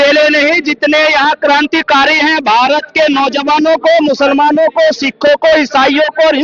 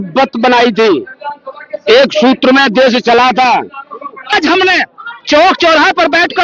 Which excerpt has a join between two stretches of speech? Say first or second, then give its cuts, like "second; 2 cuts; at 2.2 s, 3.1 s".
second; 1 cut; at 4.3 s